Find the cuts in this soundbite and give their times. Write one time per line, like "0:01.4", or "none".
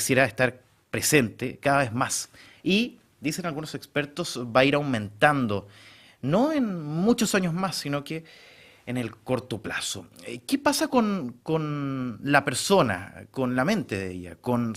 0:04.1